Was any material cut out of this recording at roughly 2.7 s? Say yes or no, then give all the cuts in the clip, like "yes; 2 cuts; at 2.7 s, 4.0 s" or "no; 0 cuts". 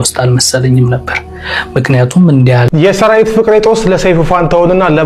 yes; 1 cut; at 2.7 s